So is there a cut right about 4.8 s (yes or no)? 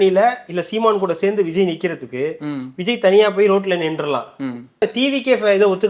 yes